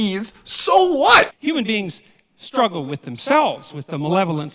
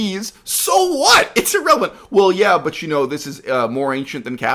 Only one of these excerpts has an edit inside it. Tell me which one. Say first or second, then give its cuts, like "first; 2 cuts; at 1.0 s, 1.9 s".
first; 1 cut; at 1.3 s